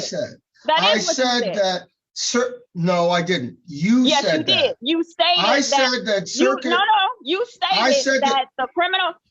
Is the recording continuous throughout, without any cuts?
yes; 0 cuts

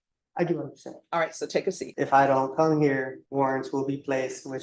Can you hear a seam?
yes; 2 cuts; at 1.9 s, 3.2 s

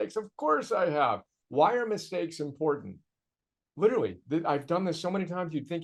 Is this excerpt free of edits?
yes; 0 cuts

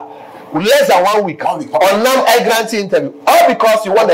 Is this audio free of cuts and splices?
yes; 0 cuts

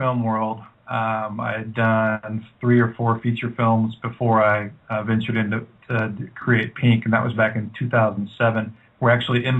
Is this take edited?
yes; 1 cut; at 1.5 s

